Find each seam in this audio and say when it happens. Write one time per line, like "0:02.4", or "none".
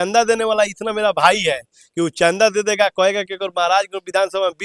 none

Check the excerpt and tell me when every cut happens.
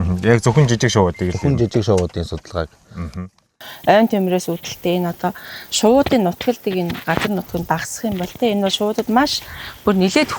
0:03.6

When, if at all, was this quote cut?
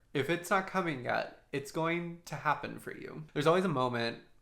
0:03.1

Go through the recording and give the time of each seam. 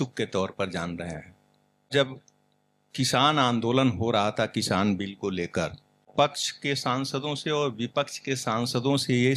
0:01.9
0:06.0

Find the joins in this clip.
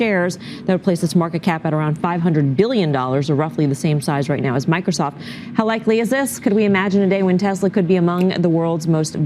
0:05.4

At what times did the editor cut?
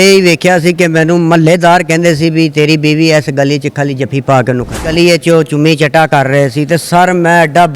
0:04.9

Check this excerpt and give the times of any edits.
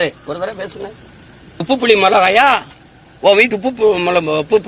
0:01.6

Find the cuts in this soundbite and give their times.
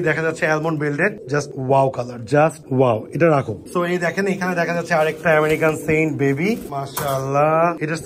none

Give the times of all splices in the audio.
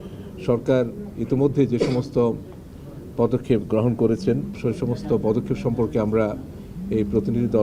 0:04.5

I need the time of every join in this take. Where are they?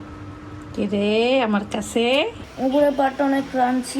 0:02.4

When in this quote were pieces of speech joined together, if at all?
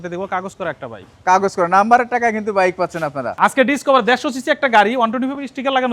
0:03.3

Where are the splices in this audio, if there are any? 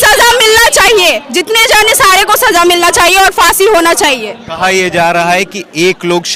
none

